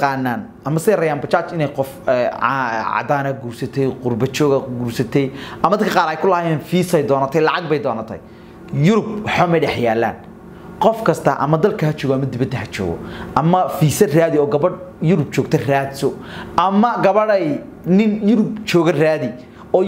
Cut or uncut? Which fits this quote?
uncut